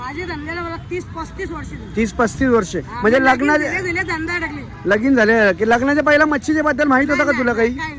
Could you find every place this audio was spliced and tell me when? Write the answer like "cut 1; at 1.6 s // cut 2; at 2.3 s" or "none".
none